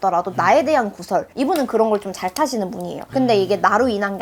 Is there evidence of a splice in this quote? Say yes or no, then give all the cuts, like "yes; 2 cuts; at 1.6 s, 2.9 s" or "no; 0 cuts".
no; 0 cuts